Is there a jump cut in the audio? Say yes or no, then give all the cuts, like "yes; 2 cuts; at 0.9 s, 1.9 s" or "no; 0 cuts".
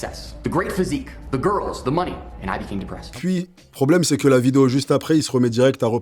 no; 0 cuts